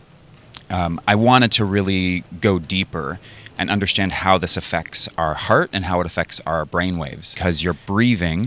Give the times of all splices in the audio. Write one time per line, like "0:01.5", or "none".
0:07.4